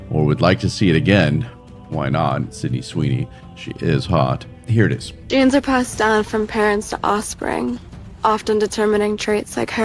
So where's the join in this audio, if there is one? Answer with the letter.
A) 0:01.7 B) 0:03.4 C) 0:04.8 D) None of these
C